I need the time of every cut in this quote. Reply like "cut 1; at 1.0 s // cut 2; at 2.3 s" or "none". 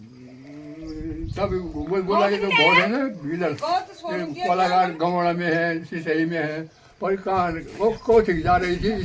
none